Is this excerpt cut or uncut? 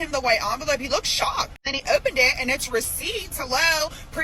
cut